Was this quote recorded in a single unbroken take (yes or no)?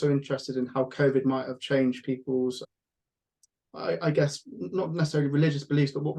yes